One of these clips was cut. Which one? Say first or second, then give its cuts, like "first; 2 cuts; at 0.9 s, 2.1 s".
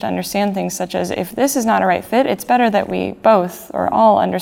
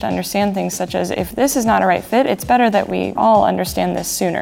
second; 1 cut; at 3.1 s